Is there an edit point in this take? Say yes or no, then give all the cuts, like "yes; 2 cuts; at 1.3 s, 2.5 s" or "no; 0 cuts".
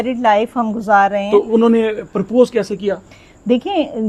no; 0 cuts